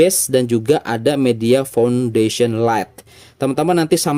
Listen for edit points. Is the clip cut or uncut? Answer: uncut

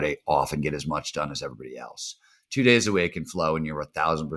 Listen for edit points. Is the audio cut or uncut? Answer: uncut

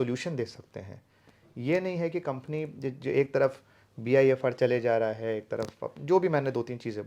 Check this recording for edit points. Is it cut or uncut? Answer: uncut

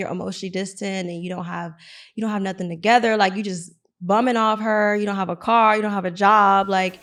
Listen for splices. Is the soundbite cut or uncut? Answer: uncut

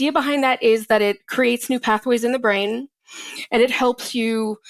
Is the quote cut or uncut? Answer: uncut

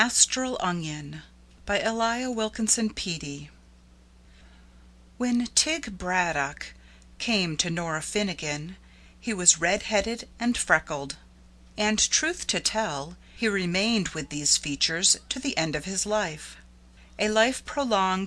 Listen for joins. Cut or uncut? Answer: cut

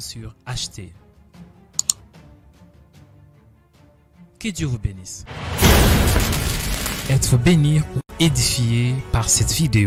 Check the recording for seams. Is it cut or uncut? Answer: uncut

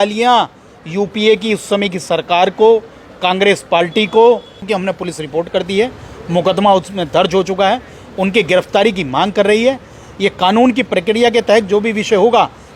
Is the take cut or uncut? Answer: cut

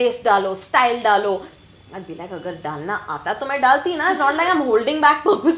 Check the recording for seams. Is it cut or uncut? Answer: uncut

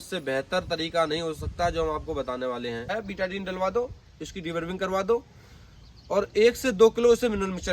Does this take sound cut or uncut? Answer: cut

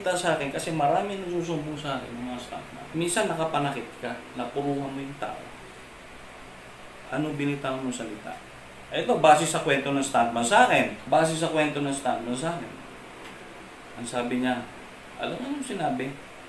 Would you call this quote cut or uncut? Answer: uncut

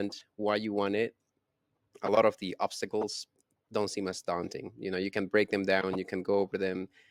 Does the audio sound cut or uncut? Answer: uncut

